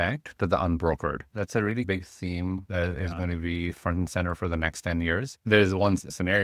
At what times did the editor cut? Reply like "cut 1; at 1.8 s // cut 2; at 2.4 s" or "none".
cut 1; at 5.3 s